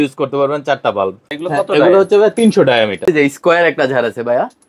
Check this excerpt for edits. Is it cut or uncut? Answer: cut